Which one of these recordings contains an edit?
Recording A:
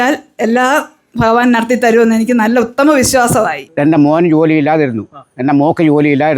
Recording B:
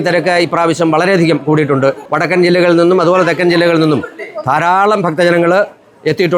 A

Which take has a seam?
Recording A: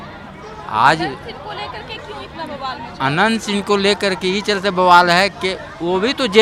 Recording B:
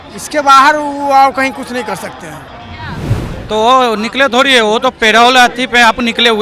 B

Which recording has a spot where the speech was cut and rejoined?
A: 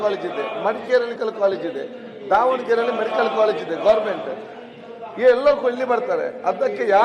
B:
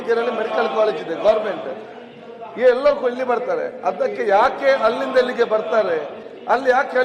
A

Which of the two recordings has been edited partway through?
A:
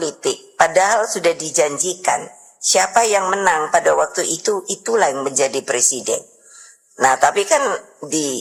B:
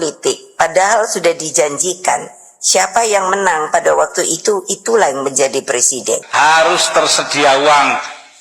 B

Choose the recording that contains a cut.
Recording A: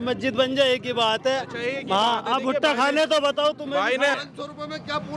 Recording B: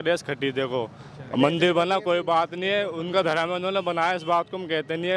A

